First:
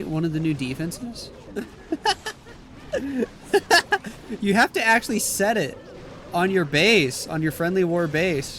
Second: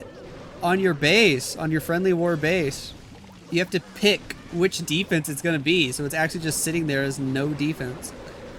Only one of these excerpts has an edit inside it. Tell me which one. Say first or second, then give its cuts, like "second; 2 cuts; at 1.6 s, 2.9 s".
first; 1 cut; at 1.3 s